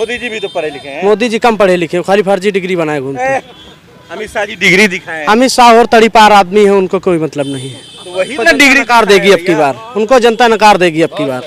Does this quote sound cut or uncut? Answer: uncut